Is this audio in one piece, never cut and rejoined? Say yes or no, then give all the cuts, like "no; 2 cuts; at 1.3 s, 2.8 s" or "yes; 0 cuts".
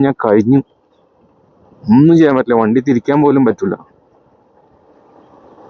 yes; 0 cuts